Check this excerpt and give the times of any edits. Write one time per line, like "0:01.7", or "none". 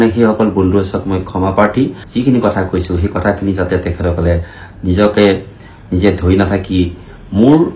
0:02.0